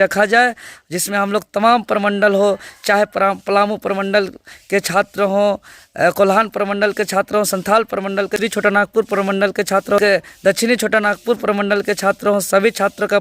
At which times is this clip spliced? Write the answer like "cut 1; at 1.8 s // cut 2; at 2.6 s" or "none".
cut 1; at 8.4 s // cut 2; at 10.0 s